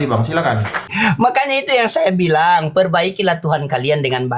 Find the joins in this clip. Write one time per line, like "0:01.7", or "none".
0:00.9